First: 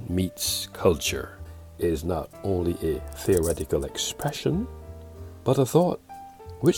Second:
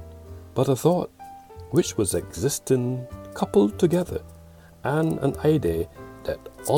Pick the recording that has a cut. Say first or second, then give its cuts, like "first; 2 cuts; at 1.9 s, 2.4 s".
first; 1 cut; at 1.4 s